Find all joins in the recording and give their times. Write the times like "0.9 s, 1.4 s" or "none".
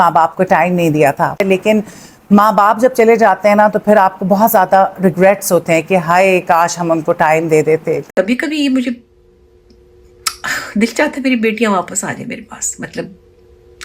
1.4 s, 8.0 s

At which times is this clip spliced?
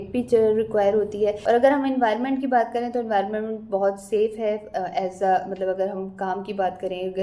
1.4 s

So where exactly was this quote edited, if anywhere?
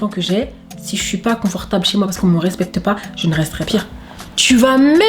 3.7 s

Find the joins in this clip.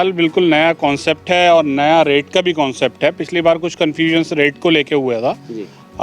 none

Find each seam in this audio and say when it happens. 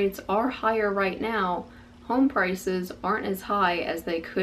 none

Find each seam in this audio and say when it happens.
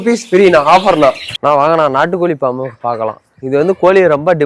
1.3 s

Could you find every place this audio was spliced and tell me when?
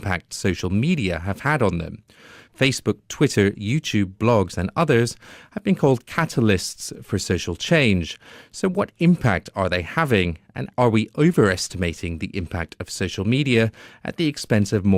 none

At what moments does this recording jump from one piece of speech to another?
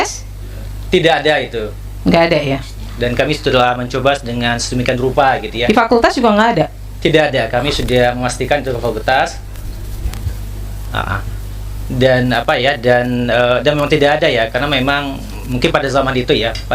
none

